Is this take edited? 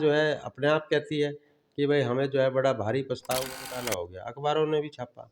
yes; 1 cut; at 3.5 s

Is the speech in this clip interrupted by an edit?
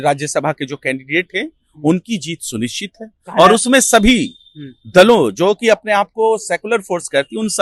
no; 0 cuts

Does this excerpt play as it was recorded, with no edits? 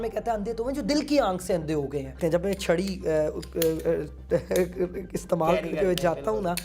no; 1 cut; at 2.1 s

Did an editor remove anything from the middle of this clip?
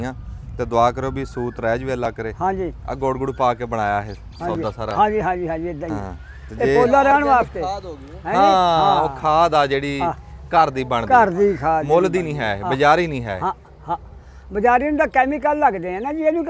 no; 0 cuts

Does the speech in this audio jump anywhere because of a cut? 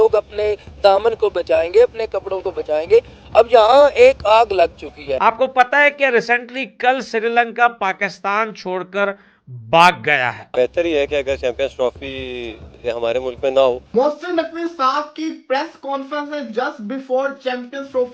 yes; 3 cuts; at 5.1 s, 10.4 s, 13.9 s

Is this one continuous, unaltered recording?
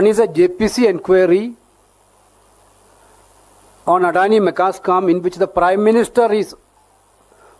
yes; 0 cuts

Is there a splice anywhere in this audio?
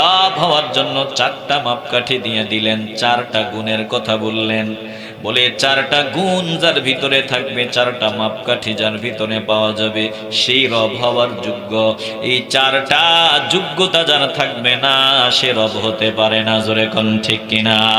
no; 0 cuts

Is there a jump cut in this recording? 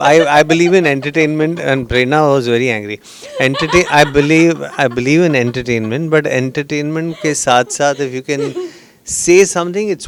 no; 0 cuts

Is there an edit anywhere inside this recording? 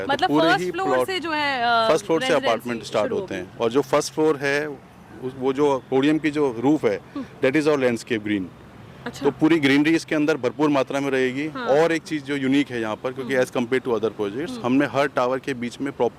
no; 0 cuts

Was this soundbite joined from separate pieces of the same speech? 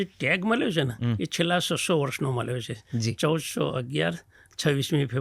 no; 0 cuts

